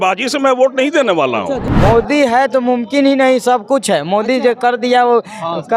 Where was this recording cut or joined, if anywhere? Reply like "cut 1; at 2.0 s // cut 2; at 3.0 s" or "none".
cut 1; at 1.6 s